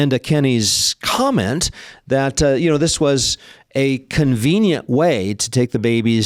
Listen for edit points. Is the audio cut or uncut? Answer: uncut